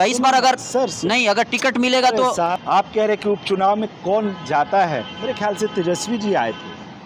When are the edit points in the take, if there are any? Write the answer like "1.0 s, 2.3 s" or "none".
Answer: 2.5 s